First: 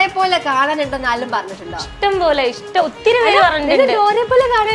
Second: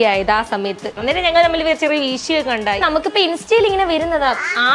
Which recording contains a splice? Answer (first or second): second